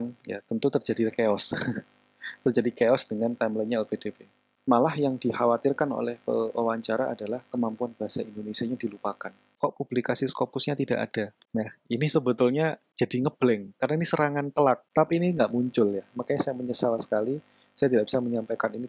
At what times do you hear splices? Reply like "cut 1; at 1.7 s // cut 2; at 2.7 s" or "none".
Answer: cut 1; at 4.5 s // cut 2; at 9.4 s // cut 3; at 14.8 s